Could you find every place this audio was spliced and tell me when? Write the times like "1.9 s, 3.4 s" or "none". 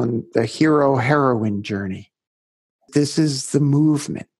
2.9 s